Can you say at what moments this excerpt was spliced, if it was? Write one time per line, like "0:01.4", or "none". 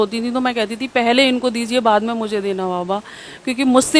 none